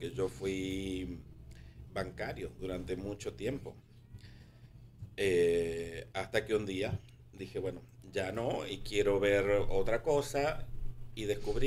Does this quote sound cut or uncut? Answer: uncut